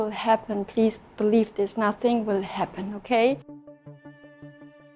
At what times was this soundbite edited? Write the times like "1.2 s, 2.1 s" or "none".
3.7 s